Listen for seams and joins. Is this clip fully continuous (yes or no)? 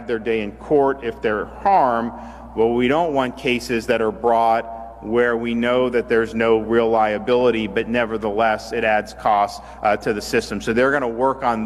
yes